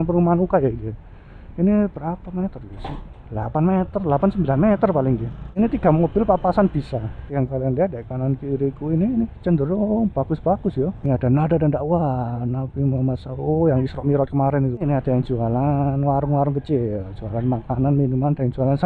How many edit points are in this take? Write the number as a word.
four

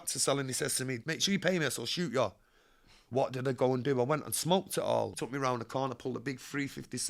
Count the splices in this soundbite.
two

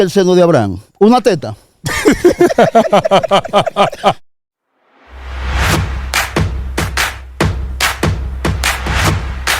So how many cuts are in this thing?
one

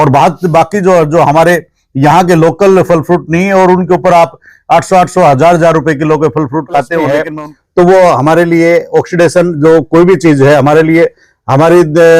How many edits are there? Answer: one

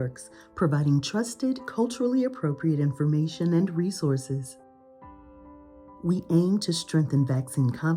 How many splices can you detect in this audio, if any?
two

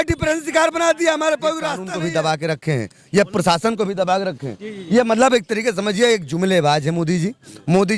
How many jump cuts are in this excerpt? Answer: one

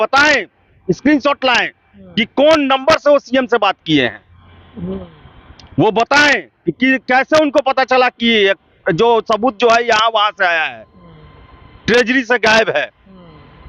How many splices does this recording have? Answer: zero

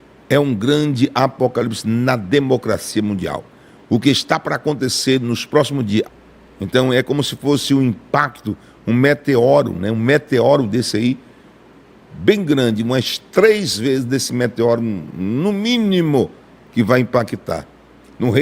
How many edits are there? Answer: one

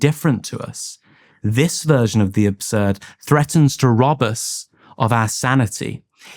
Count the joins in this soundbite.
one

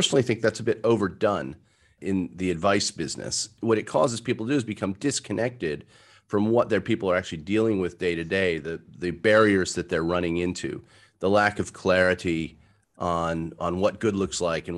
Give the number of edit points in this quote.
two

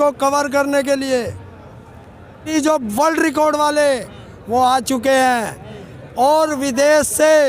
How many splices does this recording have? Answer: one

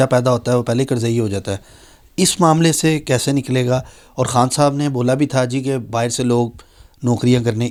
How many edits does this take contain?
zero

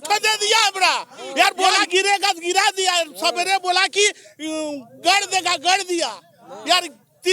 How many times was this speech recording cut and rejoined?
one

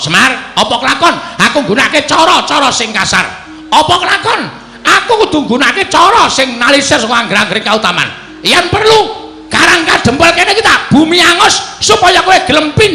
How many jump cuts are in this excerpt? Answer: zero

